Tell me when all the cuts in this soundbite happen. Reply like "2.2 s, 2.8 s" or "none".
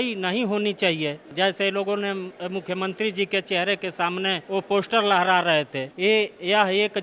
1.2 s, 4.4 s, 5.8 s